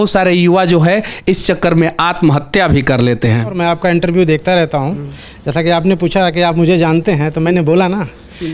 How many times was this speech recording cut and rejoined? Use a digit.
1